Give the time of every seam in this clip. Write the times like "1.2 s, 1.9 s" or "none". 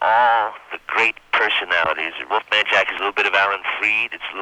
2.3 s